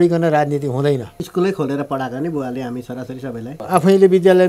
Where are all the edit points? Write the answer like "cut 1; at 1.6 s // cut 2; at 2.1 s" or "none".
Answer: cut 1; at 1.2 s // cut 2; at 3.6 s